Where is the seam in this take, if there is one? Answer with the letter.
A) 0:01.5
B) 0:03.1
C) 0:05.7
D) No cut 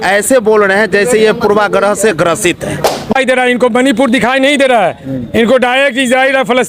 B